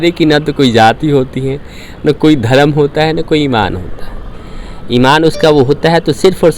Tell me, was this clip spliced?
no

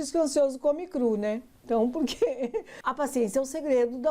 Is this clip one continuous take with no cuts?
no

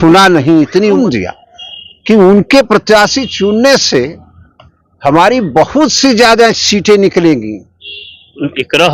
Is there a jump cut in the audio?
yes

